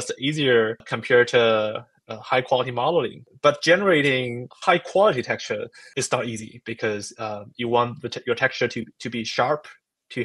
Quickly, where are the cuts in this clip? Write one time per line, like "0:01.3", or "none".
0:00.9
0:03.3
0:04.4
0:05.8